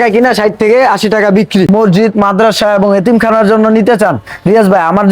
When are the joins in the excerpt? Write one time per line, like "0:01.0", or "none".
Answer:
0:01.7